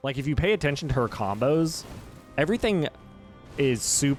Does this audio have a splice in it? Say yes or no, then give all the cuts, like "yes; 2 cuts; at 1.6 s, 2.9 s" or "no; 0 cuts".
no; 0 cuts